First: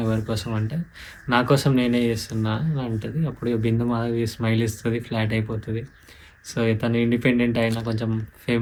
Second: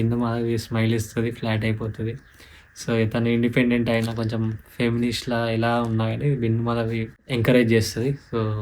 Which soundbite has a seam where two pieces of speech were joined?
second; 1 cut; at 7.2 s

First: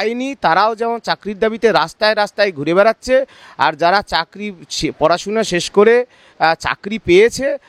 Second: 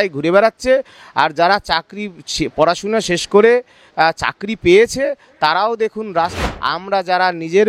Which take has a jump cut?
second; 1 cut; at 6.3 s

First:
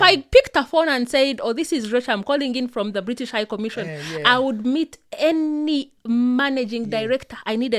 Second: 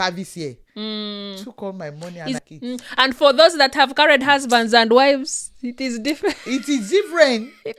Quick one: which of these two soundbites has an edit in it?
second; 1 cut; at 2.4 s

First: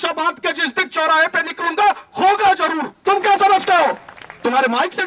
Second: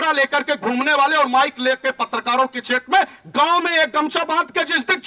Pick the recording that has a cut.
first; 1 cut; at 2.9 s

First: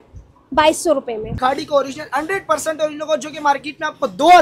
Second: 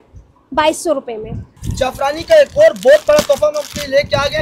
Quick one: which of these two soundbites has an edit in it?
first; 1 cut; at 1.3 s

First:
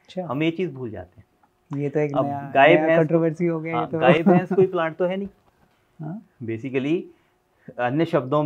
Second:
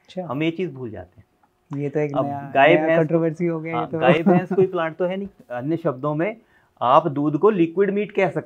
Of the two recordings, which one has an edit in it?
second; 1 cut; at 5.4 s

